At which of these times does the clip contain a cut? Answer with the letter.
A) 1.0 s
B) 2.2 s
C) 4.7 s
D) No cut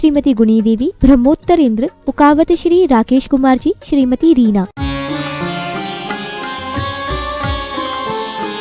C